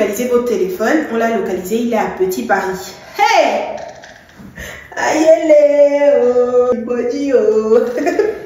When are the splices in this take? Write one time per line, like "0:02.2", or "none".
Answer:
0:06.7